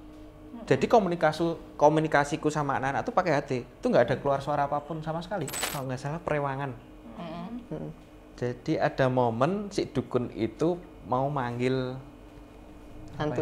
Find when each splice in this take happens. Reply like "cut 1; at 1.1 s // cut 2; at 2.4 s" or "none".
cut 1; at 5.6 s